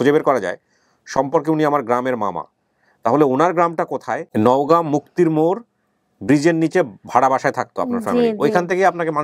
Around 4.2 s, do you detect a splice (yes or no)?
yes